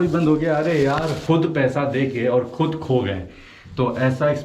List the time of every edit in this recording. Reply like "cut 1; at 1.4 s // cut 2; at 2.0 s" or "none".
cut 1; at 1.2 s